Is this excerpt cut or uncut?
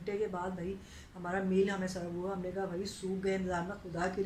uncut